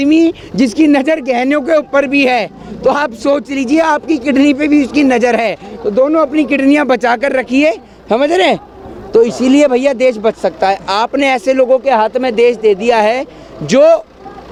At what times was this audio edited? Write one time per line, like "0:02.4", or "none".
none